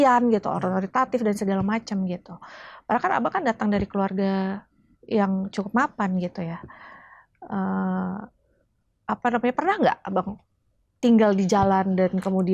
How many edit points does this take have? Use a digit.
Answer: 0